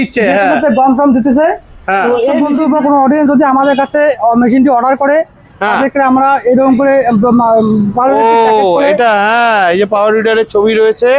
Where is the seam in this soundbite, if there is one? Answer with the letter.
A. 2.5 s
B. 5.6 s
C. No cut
A